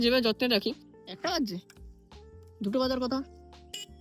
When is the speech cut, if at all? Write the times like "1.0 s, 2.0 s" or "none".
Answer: 0.9 s